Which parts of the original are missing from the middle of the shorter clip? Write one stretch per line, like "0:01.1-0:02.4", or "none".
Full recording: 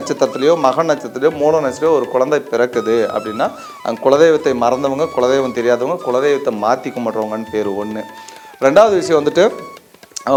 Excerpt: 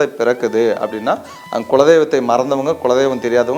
none